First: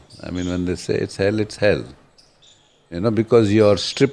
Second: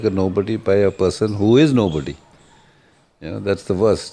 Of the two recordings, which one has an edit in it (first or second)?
second